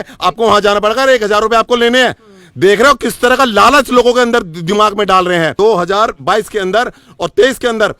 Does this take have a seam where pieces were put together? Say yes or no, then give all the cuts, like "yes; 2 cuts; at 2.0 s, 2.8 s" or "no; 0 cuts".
yes; 1 cut; at 5.5 s